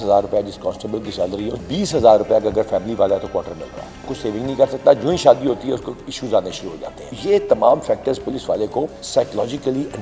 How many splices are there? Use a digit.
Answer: 4